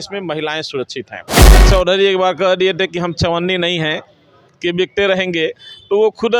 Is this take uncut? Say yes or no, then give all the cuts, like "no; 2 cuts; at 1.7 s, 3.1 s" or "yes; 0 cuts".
no; 1 cut; at 1.6 s